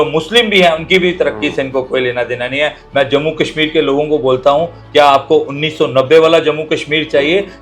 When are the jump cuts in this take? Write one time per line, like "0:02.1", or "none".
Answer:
0:02.8